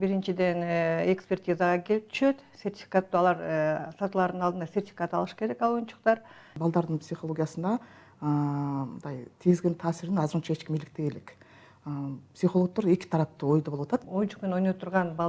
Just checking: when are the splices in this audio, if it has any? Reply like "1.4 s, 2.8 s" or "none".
6.5 s, 14.0 s